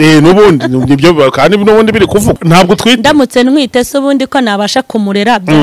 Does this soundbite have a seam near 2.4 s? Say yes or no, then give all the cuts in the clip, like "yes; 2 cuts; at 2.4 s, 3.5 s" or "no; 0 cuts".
yes; 1 cut; at 2.4 s